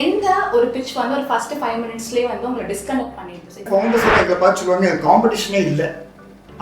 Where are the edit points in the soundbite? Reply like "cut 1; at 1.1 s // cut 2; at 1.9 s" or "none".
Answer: cut 1; at 3.7 s